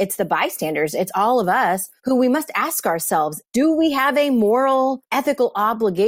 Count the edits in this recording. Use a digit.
3